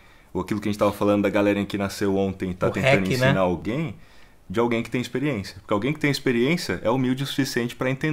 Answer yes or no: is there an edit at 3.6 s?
yes